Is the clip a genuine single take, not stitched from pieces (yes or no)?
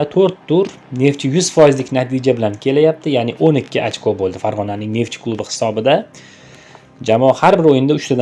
yes